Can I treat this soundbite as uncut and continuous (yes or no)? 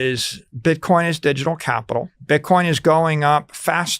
no